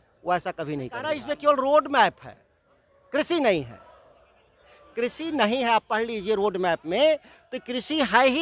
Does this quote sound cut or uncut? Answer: cut